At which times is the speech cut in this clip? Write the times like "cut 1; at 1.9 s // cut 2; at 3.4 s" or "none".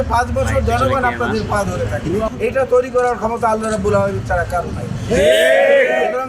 cut 1; at 2.3 s